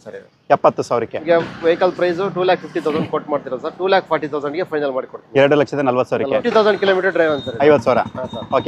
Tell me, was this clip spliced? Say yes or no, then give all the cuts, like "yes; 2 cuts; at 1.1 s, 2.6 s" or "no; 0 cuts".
yes; 2 cuts; at 1.2 s, 6.4 s